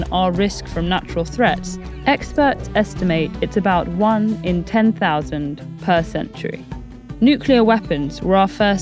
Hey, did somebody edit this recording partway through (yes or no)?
no